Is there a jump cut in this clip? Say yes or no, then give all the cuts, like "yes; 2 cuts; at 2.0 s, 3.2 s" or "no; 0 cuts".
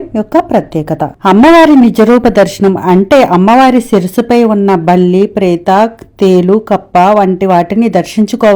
yes; 1 cut; at 1.1 s